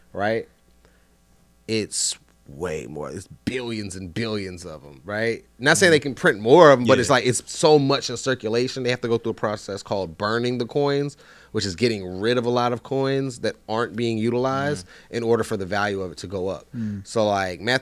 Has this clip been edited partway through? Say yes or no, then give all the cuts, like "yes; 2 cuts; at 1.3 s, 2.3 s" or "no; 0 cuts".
no; 0 cuts